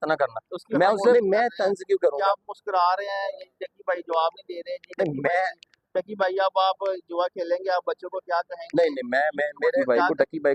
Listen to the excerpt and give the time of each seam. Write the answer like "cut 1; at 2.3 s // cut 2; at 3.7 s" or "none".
cut 1; at 1.1 s // cut 2; at 9.8 s